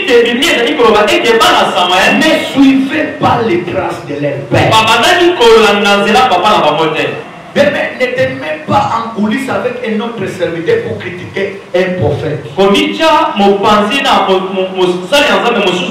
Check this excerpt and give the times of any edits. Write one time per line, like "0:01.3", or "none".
0:07.2